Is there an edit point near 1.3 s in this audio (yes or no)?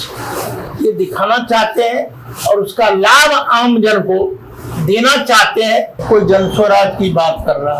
no